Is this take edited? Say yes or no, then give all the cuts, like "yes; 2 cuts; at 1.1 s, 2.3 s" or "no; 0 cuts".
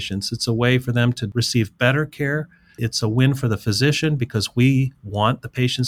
yes; 1 cut; at 2.9 s